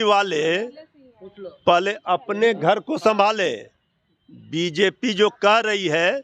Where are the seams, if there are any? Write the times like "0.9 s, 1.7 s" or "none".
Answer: none